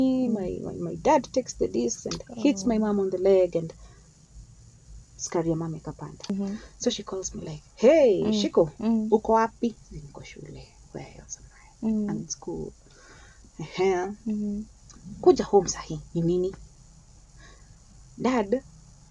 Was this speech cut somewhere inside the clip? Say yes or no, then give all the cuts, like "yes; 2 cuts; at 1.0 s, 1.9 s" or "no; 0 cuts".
yes; 1 cut; at 6.3 s